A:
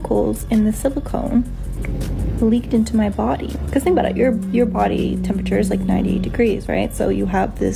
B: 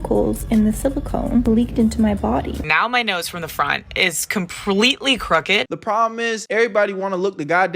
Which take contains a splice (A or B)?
B